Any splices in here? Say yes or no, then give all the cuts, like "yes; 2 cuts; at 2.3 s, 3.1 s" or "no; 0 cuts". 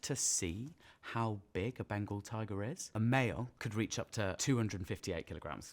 yes; 2 cuts; at 2.8 s, 3.8 s